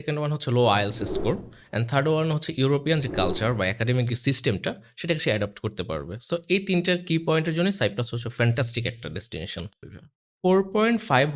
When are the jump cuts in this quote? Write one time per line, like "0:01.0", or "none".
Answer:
0:09.9